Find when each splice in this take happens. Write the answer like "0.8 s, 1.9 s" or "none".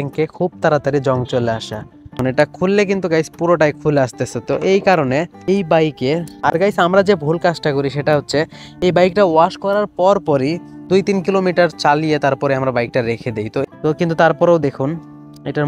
2.1 s, 6.3 s, 13.6 s